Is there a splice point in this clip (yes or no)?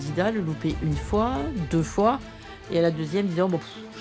no